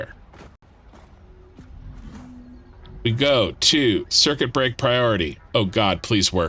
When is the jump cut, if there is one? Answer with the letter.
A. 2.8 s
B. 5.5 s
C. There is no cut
A